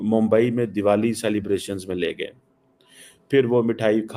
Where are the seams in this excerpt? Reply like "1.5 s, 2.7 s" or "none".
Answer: none